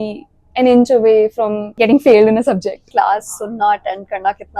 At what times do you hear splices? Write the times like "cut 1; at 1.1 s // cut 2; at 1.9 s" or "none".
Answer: cut 1; at 1.6 s // cut 2; at 2.9 s